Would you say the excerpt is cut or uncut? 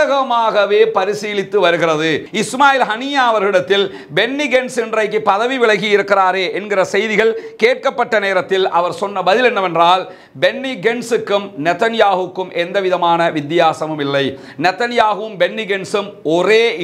cut